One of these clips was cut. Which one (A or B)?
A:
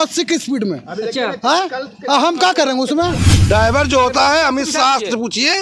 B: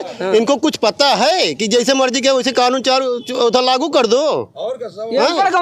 A